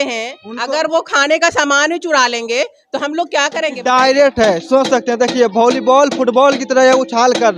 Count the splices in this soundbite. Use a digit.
1